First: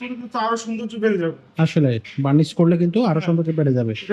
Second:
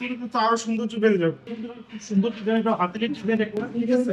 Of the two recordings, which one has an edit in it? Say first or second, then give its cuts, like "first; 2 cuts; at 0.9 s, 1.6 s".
second; 1 cut; at 1.5 s